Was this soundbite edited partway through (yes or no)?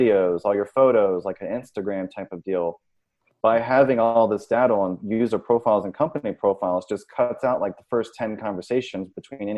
yes